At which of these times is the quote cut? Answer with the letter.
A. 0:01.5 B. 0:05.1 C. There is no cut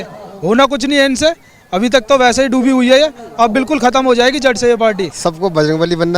B